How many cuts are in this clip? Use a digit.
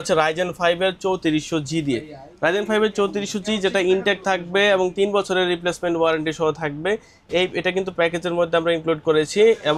0